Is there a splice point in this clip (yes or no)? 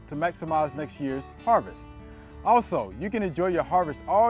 no